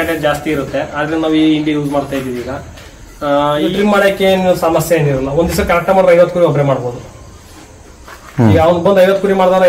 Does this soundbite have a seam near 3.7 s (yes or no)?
yes